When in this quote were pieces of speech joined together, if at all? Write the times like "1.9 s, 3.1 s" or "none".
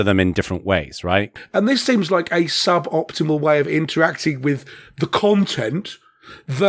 1.4 s